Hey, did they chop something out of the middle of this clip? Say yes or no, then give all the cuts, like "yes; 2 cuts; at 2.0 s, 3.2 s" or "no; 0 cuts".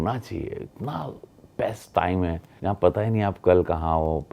yes; 1 cut; at 2.5 s